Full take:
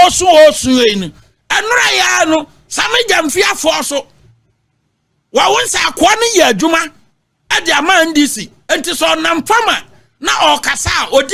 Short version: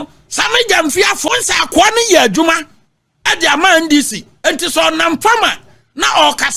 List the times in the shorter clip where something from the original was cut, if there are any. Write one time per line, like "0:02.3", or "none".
0:01.3